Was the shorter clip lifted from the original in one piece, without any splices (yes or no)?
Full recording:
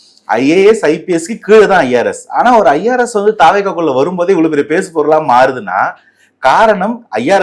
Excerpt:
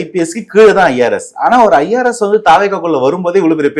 yes